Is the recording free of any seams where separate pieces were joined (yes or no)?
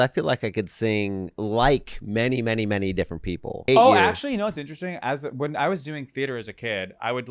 no